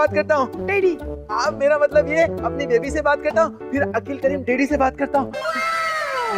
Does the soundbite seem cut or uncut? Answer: uncut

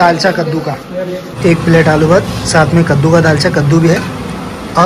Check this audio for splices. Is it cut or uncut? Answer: cut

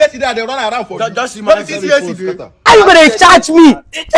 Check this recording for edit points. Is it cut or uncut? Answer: cut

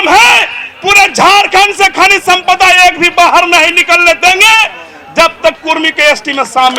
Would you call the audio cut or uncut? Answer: uncut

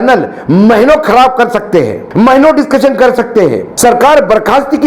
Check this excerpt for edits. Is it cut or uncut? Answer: cut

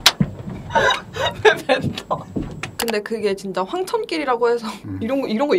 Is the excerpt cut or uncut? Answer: cut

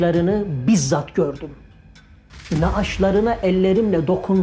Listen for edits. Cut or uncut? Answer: uncut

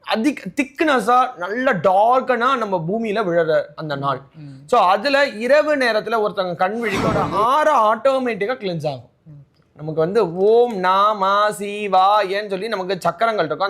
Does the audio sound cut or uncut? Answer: cut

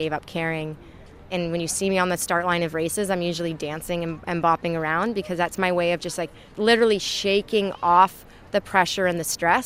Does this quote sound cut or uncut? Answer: cut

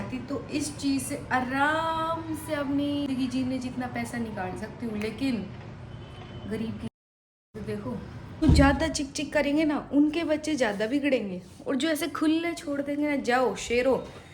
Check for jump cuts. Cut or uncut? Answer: cut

